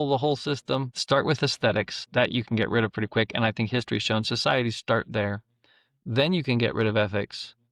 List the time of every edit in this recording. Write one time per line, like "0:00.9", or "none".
0:00.9
0:02.0